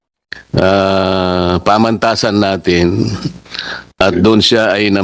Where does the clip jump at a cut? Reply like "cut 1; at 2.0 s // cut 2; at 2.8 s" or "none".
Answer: none